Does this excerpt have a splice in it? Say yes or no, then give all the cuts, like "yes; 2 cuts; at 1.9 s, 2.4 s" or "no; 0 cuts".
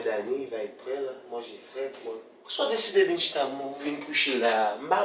yes; 1 cut; at 2.4 s